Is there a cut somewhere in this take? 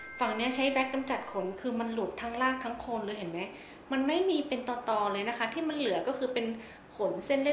no; 0 cuts

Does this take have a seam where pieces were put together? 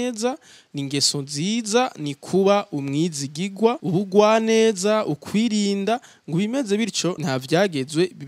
yes; 2 cuts; at 3.8 s, 7.2 s

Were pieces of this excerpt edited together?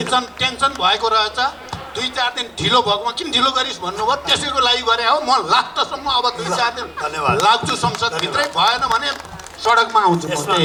no; 0 cuts

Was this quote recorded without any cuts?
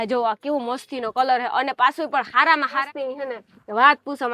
no; 1 cut; at 2.8 s

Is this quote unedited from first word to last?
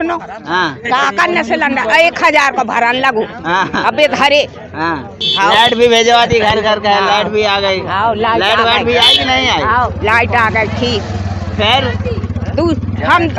yes; 0 cuts

